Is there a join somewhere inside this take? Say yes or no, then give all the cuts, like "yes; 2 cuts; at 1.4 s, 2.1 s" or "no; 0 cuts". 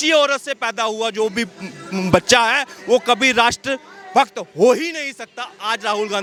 no; 0 cuts